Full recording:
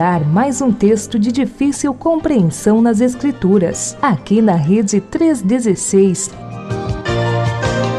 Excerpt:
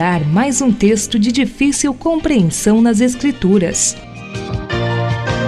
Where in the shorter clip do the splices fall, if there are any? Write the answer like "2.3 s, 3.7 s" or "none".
3.9 s